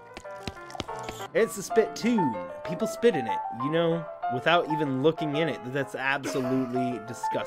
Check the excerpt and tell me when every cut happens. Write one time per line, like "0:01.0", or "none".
0:01.1